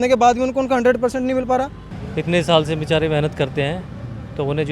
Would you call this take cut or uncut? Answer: cut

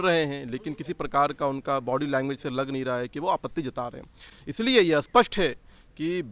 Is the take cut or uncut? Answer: uncut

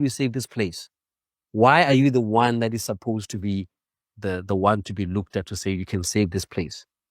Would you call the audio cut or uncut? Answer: uncut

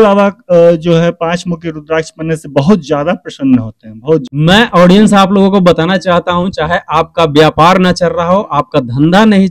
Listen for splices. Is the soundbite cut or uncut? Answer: cut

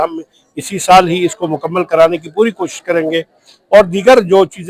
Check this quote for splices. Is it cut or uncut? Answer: uncut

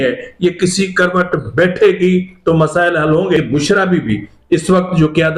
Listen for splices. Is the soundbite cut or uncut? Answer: cut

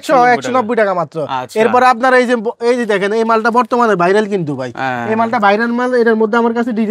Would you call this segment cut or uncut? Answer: uncut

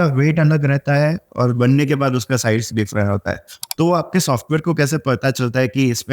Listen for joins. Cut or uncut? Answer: cut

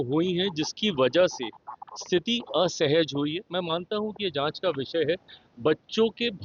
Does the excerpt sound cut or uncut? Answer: uncut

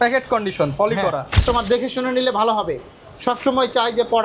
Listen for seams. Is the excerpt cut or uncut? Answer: cut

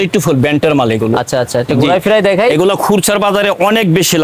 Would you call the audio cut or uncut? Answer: uncut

